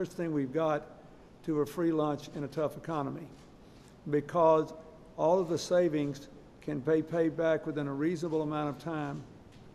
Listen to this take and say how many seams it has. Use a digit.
1